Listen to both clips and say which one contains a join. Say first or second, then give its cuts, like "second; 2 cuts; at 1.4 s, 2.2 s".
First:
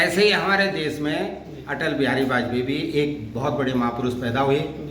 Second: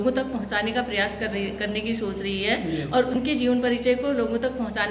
second; 1 cut; at 3.2 s